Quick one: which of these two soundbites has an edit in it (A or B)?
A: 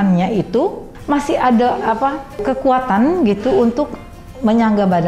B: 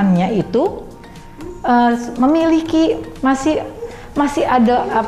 A